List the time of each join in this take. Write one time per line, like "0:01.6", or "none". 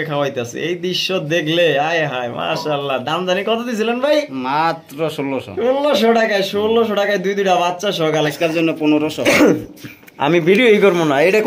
0:08.3